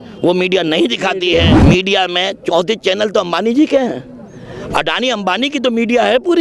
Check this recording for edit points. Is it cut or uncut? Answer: cut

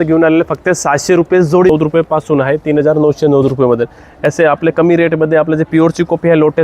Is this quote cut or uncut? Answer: cut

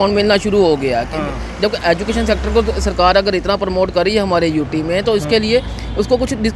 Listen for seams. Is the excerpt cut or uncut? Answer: uncut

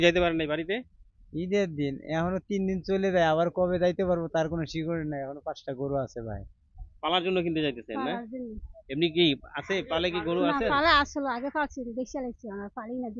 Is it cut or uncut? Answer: cut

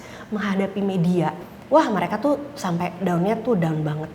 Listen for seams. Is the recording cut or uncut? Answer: cut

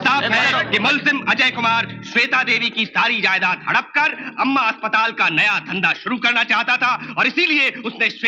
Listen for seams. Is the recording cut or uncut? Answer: uncut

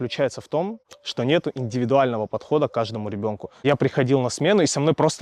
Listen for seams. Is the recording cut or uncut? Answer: cut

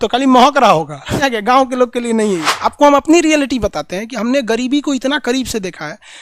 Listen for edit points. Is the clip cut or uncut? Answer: cut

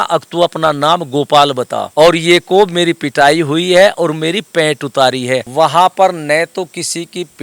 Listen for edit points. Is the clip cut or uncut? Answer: cut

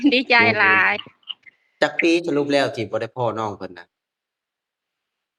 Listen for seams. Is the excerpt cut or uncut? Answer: uncut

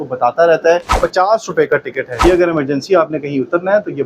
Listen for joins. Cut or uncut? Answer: cut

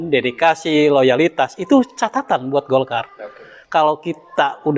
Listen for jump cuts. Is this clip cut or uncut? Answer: uncut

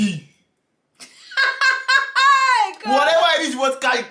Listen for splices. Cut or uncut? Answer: uncut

